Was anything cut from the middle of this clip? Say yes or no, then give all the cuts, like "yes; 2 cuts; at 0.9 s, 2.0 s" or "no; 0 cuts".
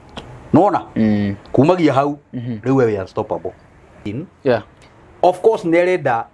yes; 1 cut; at 3.9 s